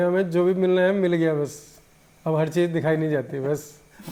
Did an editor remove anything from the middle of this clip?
no; 0 cuts

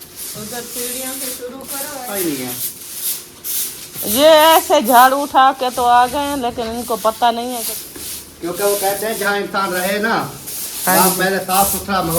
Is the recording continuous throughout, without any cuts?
no; 2 cuts; at 2.1 s, 7.7 s

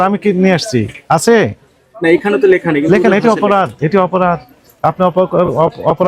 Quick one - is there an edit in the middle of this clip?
no; 0 cuts

